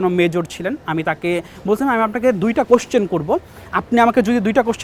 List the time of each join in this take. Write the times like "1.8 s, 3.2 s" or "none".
none